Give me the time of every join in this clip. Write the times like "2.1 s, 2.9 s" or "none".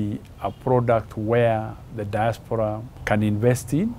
2.9 s